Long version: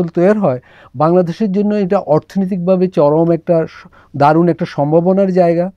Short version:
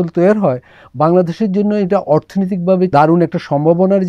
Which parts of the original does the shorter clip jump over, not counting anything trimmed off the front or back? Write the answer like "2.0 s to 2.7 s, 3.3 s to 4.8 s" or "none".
2.9 s to 4.2 s